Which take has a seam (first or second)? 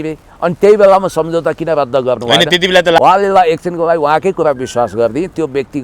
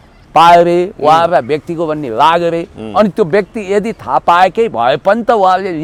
first